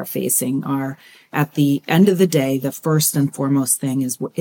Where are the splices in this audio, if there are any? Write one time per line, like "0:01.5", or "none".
0:01.3